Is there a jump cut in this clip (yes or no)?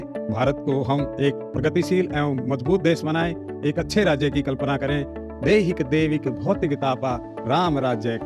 no